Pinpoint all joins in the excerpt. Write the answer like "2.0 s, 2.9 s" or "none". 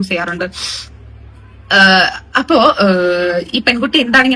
none

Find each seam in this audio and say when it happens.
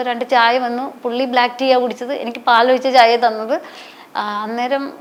none

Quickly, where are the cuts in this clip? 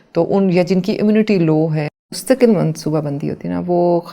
1.9 s

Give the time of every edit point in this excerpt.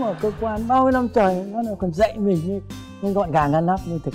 none

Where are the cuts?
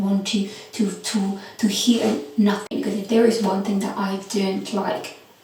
2.6 s

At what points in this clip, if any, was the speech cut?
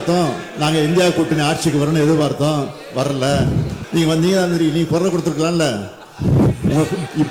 3.8 s

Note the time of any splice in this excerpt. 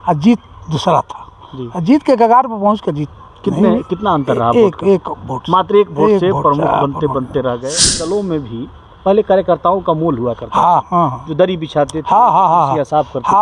7.7 s

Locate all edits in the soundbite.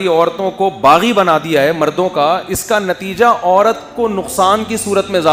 none

